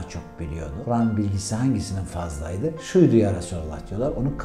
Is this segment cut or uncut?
cut